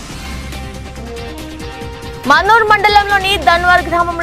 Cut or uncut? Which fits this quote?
uncut